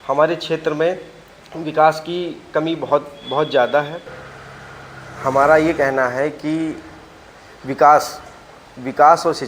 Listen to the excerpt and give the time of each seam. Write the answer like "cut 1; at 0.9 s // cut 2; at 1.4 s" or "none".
cut 1; at 4.5 s